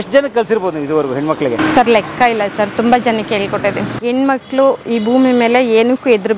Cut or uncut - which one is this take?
cut